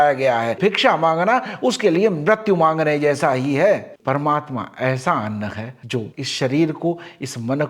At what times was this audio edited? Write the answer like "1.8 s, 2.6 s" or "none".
3.9 s